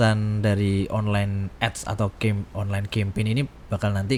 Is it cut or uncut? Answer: uncut